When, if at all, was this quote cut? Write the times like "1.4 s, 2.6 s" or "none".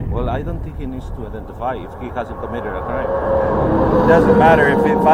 none